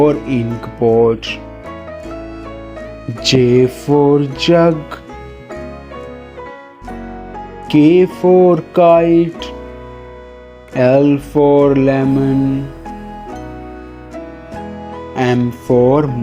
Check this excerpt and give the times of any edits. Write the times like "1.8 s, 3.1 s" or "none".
9.3 s, 10.7 s, 12.8 s, 15.1 s